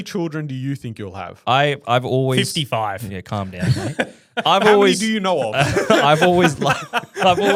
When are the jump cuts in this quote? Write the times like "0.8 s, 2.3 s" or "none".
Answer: none